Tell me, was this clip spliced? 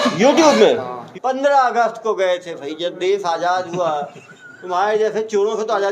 yes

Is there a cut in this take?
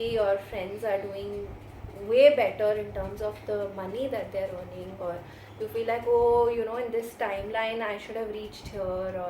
no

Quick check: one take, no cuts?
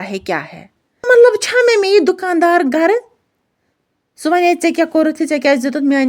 no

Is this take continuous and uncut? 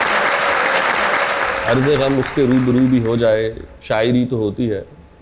no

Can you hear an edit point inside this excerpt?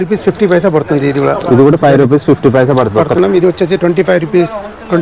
yes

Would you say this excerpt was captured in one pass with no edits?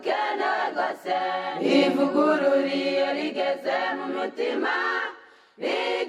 yes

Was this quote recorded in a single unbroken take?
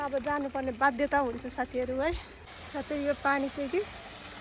no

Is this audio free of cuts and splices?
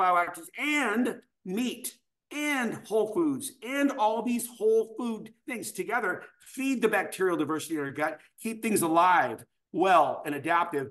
yes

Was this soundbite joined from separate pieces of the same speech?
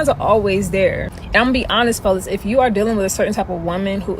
yes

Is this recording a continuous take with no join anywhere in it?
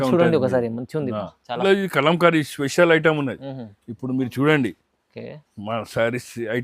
no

